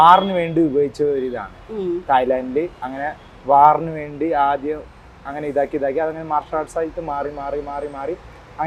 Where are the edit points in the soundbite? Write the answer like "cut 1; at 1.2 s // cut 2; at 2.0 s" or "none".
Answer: none